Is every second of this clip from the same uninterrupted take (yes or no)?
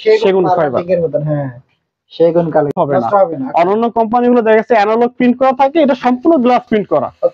no